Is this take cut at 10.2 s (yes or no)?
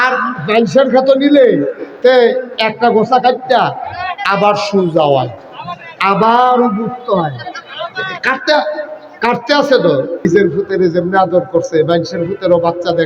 yes